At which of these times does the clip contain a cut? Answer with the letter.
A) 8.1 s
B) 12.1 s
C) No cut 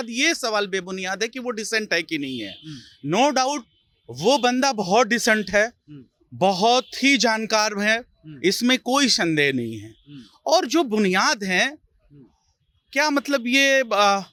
C